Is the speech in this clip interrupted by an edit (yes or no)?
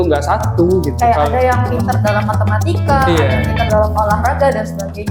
no